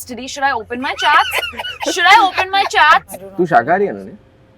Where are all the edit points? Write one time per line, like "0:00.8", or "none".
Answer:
0:03.2